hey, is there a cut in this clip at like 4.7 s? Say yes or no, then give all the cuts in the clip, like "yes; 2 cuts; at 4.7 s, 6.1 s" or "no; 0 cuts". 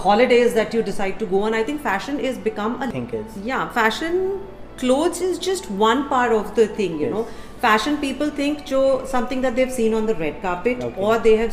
no; 1 cut; at 2.9 s